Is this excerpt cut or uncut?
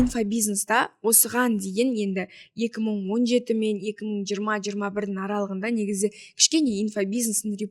uncut